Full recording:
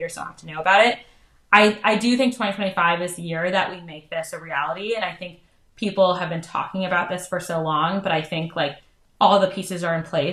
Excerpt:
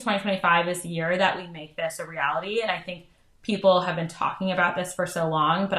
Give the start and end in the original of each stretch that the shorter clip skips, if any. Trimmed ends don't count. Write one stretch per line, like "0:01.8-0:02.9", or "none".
none